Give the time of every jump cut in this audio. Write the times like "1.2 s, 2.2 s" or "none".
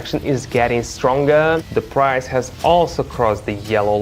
1.7 s